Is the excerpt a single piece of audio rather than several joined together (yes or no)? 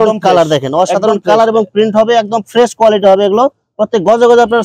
yes